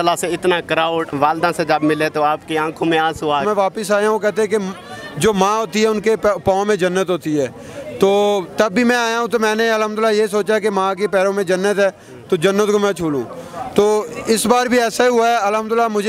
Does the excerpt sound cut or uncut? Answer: cut